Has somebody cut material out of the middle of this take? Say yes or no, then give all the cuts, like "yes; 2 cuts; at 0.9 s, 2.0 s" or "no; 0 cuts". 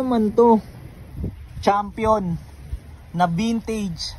no; 0 cuts